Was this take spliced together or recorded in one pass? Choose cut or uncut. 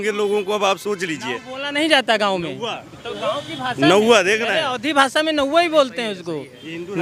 uncut